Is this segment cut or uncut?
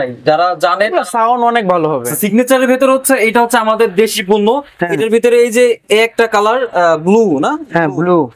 cut